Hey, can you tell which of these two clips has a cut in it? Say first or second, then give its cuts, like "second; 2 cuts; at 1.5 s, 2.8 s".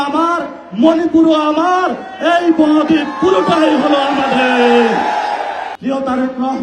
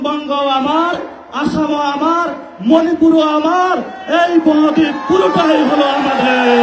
first; 1 cut; at 5.7 s